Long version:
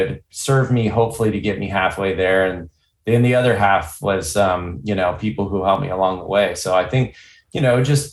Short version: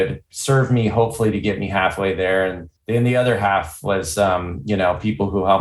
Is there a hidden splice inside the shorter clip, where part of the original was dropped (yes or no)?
yes